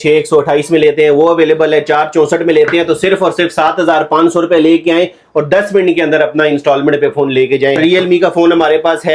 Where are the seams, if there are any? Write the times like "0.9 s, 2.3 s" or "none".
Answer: 7.8 s